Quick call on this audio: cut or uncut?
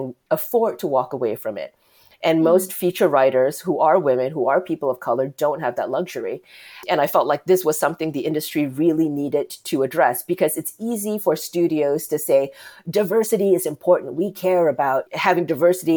cut